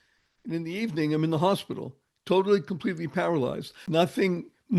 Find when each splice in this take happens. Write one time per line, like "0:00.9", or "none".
0:03.8